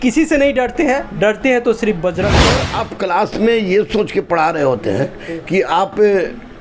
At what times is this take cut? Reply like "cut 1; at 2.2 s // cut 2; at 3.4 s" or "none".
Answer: cut 1; at 2.6 s